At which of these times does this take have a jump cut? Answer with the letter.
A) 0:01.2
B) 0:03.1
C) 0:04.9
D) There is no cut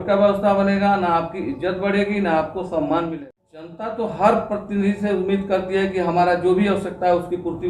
B